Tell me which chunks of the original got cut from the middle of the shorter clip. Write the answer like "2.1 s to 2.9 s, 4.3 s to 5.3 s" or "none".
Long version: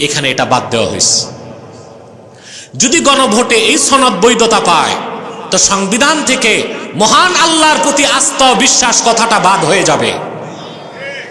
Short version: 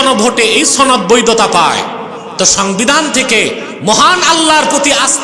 none

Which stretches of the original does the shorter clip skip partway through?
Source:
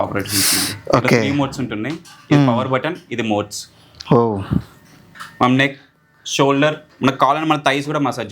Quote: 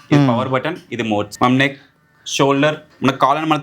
3.5 s to 5.3 s

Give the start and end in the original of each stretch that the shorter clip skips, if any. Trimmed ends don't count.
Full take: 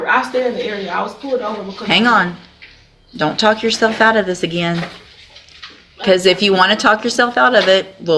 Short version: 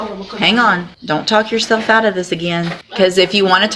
2.4 s to 3.0 s, 4.9 s to 5.9 s

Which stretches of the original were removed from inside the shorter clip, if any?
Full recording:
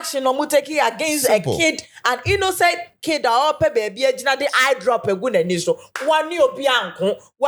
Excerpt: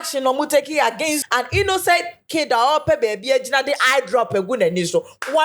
1.2 s to 1.9 s

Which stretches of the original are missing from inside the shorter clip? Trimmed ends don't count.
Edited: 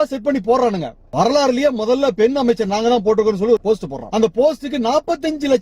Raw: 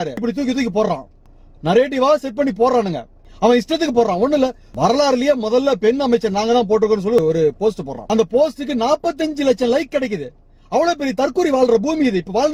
3.1 s to 4.6 s, 7.2 s to 7.5 s

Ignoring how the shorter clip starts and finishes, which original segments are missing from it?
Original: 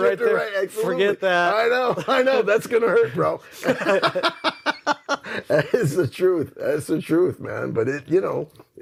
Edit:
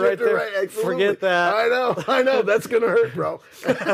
none

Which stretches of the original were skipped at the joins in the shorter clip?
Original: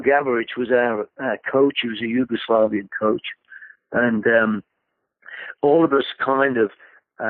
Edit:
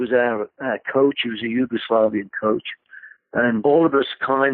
4.2 s to 5.6 s

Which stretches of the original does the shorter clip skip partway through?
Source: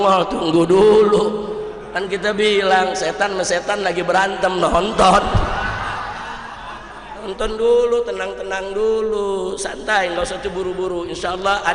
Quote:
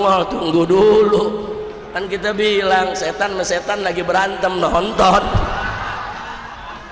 none

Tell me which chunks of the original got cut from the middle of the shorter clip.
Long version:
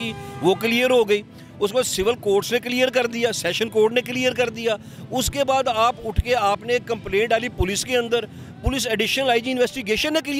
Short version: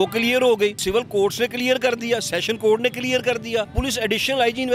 1.3 s to 1.9 s, 4.8 s to 8.6 s

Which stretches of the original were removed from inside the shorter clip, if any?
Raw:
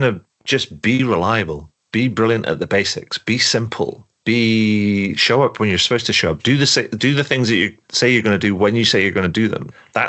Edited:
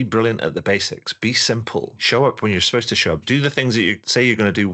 4.0 s to 5.2 s, 7.0 s to 7.7 s

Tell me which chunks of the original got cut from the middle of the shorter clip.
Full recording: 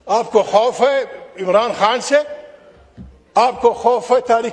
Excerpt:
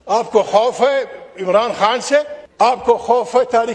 2.4 s to 3.2 s

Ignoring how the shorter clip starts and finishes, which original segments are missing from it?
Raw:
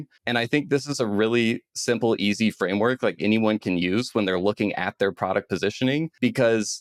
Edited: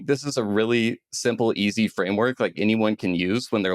none

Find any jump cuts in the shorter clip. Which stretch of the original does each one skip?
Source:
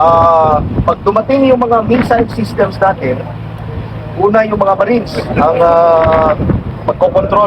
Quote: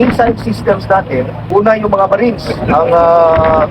3.3 s to 4.1 s

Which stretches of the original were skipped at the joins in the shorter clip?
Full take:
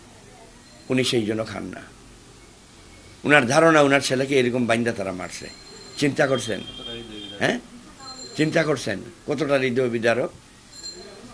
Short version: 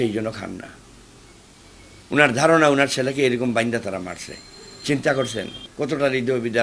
6.7 s to 9.1 s

